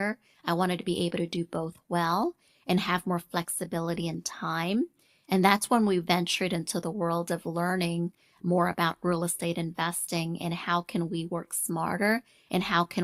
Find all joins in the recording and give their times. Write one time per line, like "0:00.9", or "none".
none